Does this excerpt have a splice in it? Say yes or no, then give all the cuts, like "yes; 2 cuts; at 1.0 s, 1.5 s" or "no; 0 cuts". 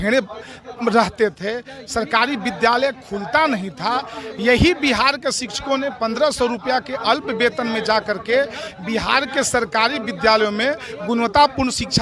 no; 0 cuts